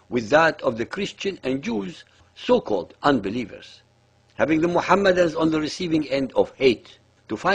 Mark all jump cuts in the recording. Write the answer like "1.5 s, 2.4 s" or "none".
none